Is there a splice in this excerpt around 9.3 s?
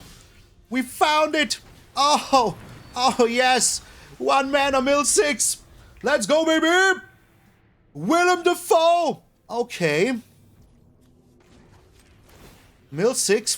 yes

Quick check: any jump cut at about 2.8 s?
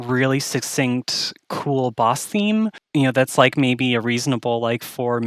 yes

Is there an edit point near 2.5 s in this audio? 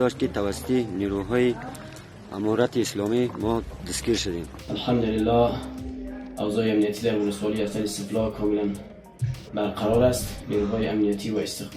no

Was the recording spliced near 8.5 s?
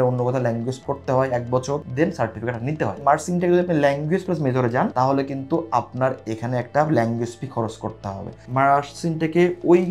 yes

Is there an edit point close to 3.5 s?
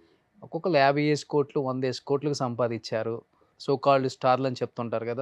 yes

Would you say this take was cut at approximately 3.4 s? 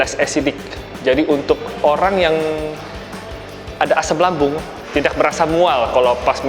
no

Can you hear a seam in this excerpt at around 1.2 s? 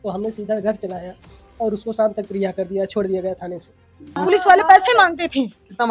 no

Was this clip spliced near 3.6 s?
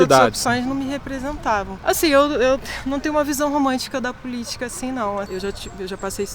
no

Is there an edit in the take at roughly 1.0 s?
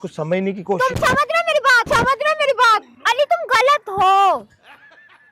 no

